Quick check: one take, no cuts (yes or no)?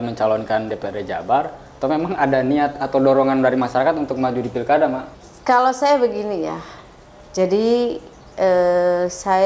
no